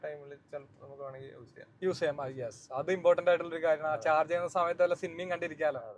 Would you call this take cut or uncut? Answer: uncut